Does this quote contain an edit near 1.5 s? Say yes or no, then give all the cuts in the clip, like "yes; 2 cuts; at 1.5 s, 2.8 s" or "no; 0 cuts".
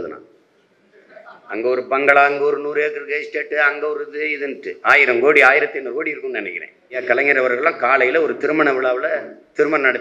no; 1 cut; at 7.0 s